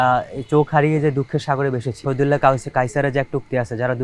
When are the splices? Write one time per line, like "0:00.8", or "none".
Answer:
0:02.0